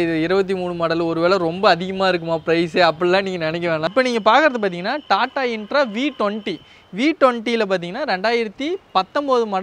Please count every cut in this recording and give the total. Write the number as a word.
one